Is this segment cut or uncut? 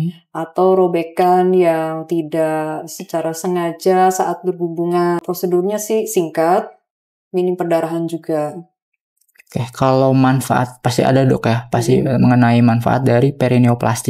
cut